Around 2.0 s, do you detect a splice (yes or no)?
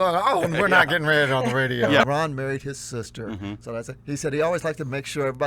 yes